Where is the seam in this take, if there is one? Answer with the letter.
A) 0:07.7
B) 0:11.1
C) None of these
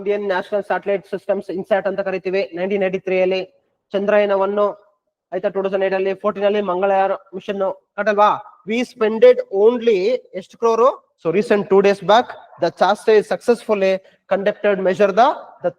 B